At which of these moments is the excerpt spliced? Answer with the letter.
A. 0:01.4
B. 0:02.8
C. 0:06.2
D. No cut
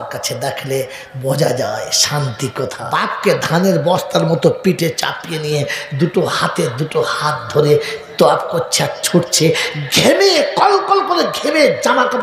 B